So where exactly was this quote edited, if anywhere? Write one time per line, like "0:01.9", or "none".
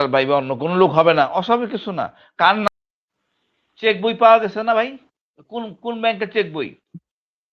0:02.7

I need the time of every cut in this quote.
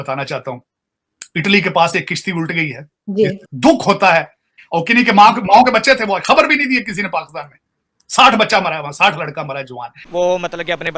0:03.4
0:10.0

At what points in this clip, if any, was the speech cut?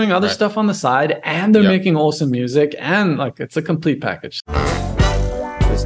0:04.3

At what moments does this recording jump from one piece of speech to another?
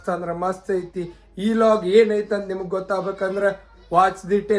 none

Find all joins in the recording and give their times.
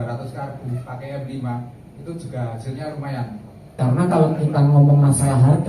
0:03.7

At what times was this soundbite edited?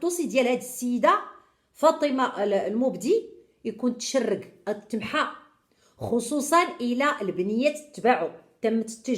none

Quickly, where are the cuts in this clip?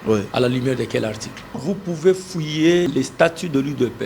0:01.6
0:02.9

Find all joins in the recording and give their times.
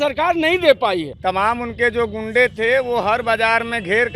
0:01.1

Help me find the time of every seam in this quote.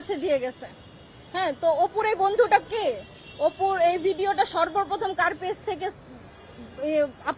none

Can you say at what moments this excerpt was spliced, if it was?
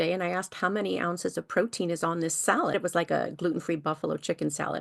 0:02.7

